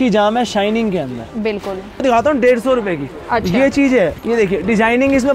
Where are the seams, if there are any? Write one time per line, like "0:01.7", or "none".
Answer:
0:02.0